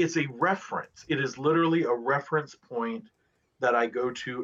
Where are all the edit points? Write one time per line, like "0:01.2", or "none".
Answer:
none

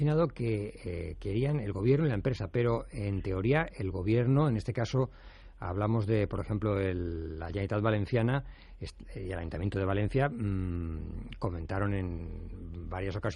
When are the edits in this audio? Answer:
0:04.9

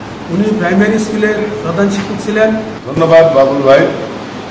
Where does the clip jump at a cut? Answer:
0:02.8

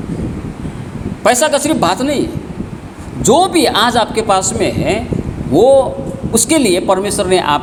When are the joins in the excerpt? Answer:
none

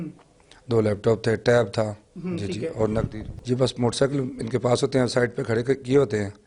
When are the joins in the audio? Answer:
0:02.1
0:03.3

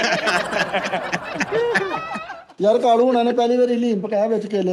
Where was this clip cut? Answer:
0:02.4

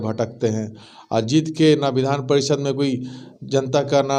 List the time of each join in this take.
none

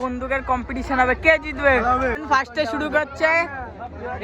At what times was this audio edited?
0:02.2

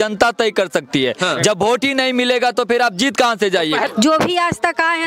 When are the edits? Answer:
0:03.9

